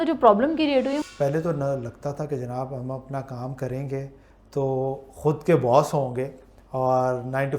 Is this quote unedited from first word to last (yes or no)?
no